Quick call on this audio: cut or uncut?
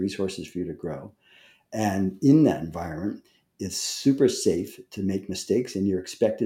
uncut